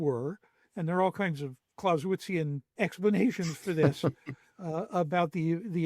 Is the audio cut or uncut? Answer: cut